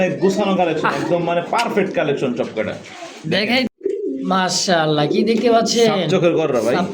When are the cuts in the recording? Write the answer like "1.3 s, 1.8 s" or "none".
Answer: 3.7 s